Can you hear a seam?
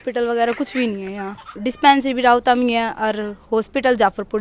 no; 0 cuts

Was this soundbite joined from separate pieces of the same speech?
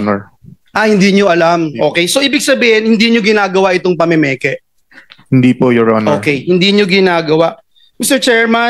no; 0 cuts

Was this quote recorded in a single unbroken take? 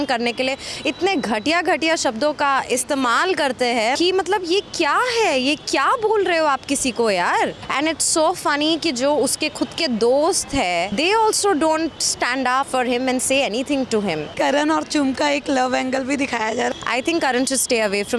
no; 6 cuts; at 4.0 s, 7.6 s, 10.9 s, 12.7 s, 14.3 s, 16.7 s

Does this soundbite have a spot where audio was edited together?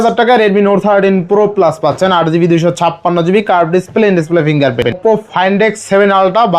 yes; 1 cut; at 5.0 s

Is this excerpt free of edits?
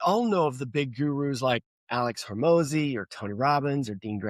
no; 1 cut; at 1.8 s

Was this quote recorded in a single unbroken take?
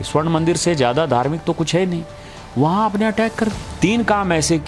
no; 1 cut; at 3.7 s

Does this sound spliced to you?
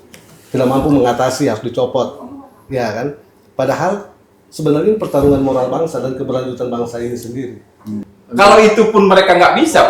yes; 1 cut; at 8.1 s

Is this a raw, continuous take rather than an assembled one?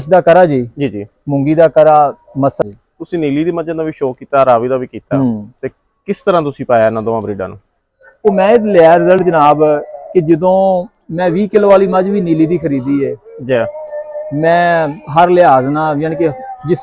no; 2 cuts; at 2.6 s, 8.1 s

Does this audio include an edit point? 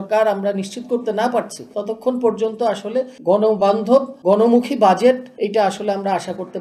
yes; 4 cuts; at 1.6 s, 3.1 s, 4.1 s, 5.3 s

